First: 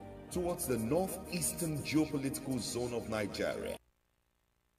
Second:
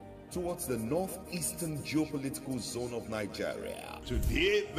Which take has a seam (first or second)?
first